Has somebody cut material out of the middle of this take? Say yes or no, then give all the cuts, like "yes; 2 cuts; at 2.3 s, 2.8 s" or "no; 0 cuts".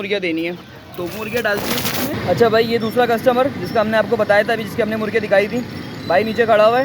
yes; 1 cut; at 2.1 s